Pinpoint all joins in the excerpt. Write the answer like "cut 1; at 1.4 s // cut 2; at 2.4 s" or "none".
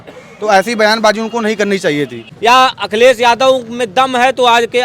cut 1; at 2.2 s